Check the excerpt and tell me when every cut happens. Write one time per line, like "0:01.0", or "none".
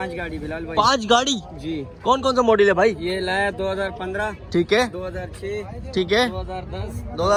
none

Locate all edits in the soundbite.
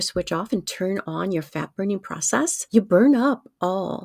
0:02.6

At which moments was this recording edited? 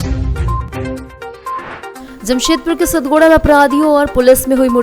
0:01.6

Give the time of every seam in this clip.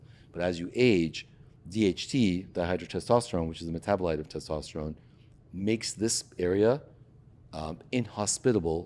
none

